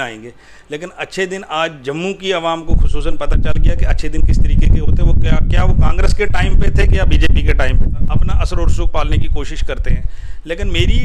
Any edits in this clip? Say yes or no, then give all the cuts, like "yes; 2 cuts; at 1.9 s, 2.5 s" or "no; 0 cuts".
yes; 1 cut; at 7.9 s